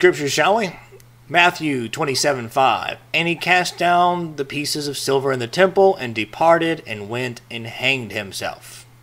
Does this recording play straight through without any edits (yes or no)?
yes